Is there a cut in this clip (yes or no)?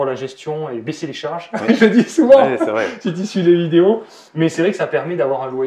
no